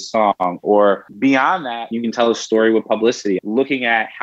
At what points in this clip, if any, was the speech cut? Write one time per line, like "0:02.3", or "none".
0:01.5
0:03.4